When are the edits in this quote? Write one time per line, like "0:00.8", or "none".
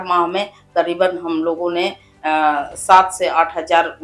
none